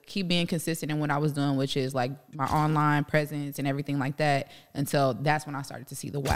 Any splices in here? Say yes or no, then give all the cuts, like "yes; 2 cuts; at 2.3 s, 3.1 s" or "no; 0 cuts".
no; 0 cuts